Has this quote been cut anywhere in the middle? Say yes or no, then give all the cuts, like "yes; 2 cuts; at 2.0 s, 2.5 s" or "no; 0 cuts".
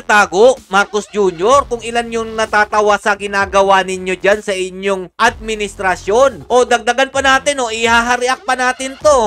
no; 0 cuts